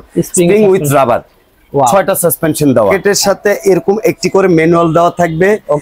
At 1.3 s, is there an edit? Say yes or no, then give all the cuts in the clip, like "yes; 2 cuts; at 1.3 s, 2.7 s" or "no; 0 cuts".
no; 1 cut; at 3.0 s